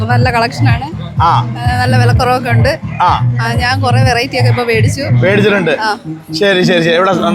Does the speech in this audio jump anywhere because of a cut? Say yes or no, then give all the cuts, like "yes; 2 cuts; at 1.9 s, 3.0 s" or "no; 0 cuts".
no; 0 cuts